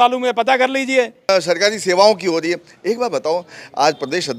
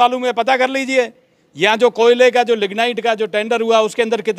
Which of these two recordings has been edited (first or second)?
first